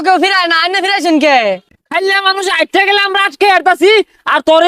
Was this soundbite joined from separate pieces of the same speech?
yes; 1 cut; at 1.8 s

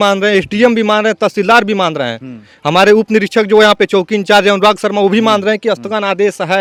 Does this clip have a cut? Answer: no; 0 cuts

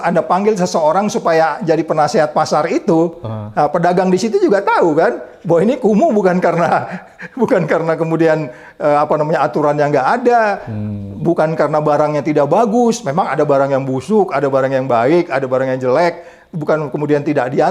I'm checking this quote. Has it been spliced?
no; 0 cuts

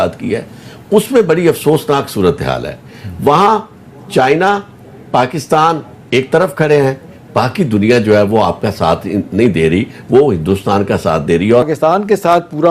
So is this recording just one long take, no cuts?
no; 1 cut; at 11.7 s

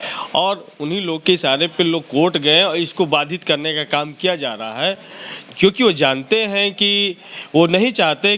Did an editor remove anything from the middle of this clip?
no; 0 cuts

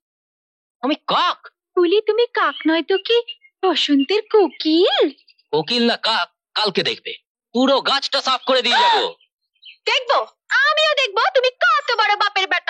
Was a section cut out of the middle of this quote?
no; 0 cuts

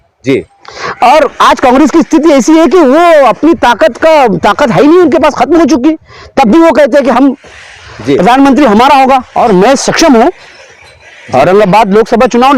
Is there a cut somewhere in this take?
yes; 1 cut; at 9.3 s

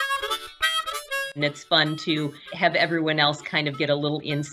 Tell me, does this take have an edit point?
yes; 2 cuts; at 1.4 s, 2.5 s

